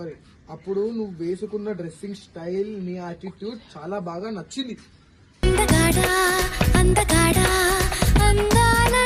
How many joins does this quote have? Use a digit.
0